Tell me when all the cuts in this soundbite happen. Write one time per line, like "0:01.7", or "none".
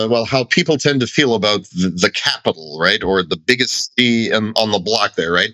none